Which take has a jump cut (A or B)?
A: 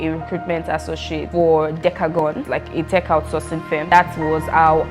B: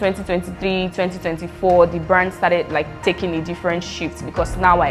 A